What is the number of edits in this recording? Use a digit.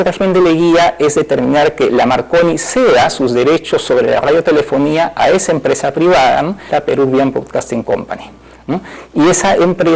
0